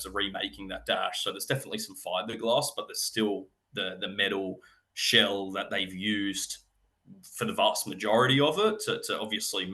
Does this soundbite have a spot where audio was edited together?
no; 0 cuts

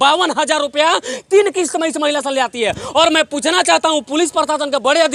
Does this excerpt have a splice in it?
no; 0 cuts

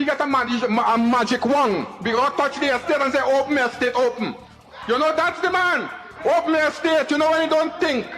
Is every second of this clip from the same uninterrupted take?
yes; 0 cuts

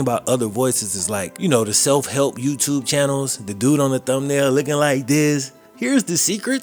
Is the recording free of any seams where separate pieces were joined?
yes; 0 cuts

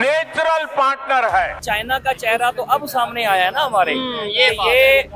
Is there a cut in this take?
yes; 1 cut; at 1.6 s

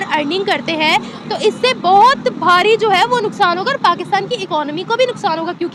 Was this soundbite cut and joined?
no; 0 cuts

